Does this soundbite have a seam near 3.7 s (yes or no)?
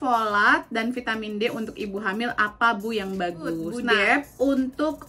yes